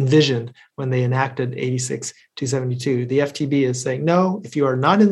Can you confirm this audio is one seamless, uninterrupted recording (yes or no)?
yes